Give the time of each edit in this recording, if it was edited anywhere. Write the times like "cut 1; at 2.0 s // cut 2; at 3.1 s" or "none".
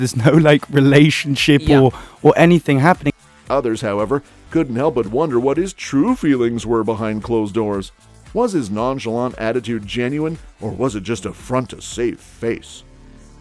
none